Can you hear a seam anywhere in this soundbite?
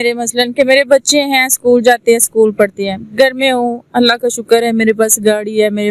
no; 0 cuts

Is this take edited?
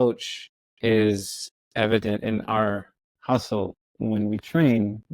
yes; 1 cut; at 3.8 s

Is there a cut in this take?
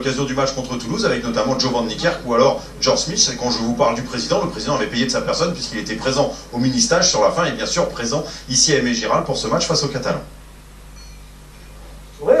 yes; 1 cut; at 5.1 s

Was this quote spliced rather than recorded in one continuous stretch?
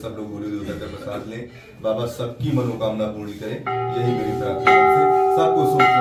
no; 0 cuts

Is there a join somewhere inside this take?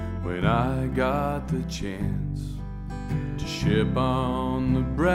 no; 0 cuts

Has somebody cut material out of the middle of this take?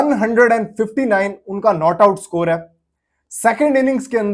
no; 0 cuts

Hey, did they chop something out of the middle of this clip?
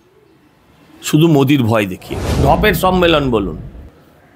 yes; 1 cut; at 2.4 s

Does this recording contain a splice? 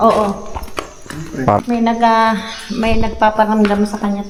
no; 0 cuts

